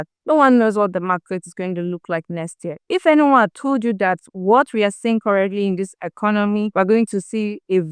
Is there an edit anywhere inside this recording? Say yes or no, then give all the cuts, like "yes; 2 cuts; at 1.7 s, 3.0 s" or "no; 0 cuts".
no; 0 cuts